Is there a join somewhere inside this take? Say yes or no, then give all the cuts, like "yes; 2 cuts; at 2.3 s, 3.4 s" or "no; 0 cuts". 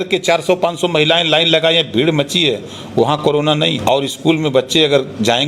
yes; 1 cut; at 3.8 s